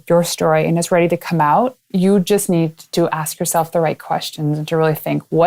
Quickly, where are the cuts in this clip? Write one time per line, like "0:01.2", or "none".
none